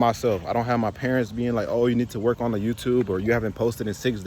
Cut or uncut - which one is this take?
uncut